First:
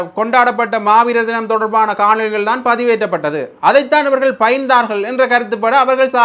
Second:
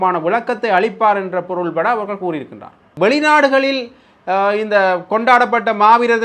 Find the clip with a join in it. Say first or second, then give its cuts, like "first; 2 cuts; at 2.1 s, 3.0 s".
second; 1 cut; at 2.9 s